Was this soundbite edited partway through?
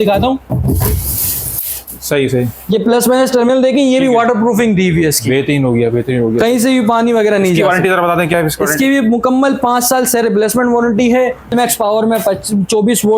yes; 1 cut; at 11.5 s

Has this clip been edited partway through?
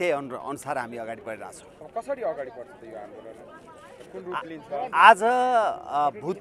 no; 0 cuts

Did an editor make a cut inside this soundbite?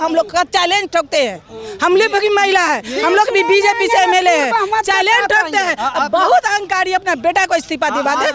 no; 0 cuts

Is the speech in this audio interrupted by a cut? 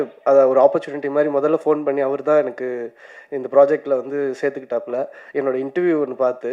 no; 0 cuts

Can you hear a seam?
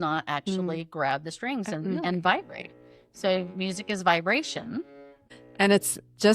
yes; 1 cut; at 5.4 s

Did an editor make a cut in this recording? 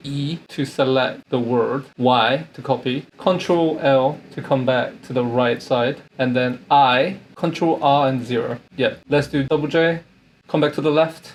no; 0 cuts

